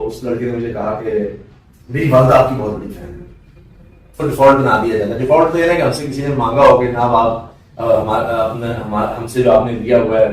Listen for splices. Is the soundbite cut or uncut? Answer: cut